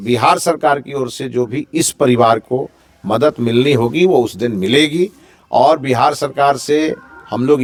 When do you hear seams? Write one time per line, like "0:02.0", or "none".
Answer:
none